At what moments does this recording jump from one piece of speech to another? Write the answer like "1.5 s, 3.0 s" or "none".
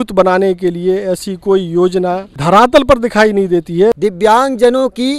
2.3 s, 4.0 s